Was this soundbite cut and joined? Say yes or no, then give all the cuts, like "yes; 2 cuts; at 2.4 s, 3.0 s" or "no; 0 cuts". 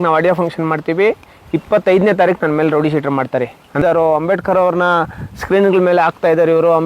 yes; 1 cut; at 3.8 s